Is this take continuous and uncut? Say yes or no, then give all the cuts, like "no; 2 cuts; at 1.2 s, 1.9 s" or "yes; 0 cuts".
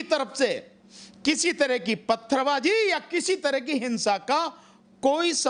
yes; 0 cuts